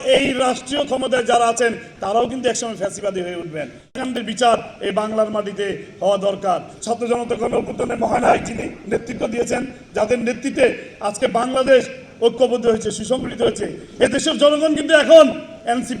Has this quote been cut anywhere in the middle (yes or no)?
no